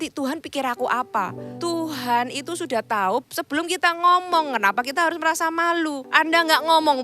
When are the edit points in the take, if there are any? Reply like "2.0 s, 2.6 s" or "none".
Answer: 1.4 s, 3.2 s, 6.0 s